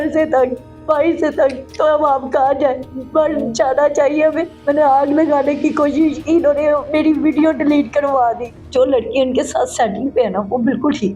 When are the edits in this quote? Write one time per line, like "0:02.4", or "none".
0:04.5
0:08.5